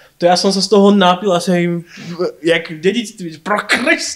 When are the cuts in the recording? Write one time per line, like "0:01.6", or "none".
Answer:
none